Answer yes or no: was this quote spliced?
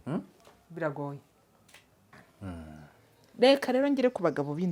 yes